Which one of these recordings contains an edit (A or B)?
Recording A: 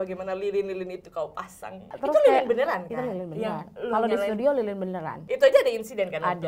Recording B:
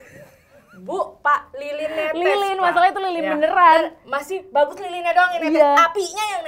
A